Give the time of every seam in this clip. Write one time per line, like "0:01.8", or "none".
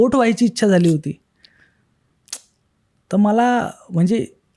none